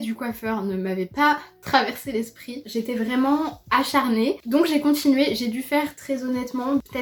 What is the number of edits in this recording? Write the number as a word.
zero